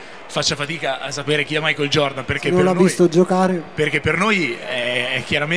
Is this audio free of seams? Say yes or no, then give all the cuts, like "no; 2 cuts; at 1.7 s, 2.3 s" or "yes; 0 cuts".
yes; 0 cuts